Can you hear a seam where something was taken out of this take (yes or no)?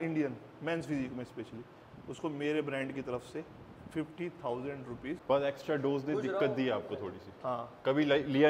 yes